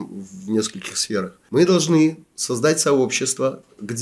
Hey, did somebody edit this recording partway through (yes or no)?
yes